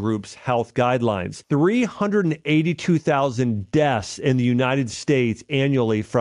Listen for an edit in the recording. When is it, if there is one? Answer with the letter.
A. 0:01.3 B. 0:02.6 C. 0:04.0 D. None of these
A